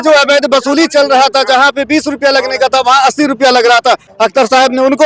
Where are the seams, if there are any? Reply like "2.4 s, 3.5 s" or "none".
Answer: 4.1 s